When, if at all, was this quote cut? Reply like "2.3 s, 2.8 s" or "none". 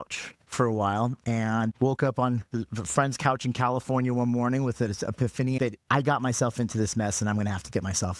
5.6 s